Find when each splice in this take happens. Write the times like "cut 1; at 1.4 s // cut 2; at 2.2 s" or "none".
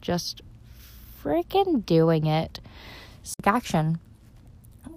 cut 1; at 3.4 s